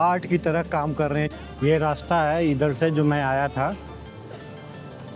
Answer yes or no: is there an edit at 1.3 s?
yes